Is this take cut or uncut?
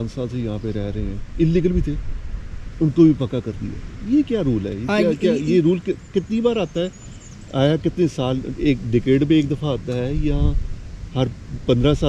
uncut